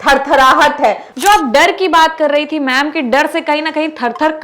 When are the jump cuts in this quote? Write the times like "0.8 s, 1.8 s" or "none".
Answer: 1.1 s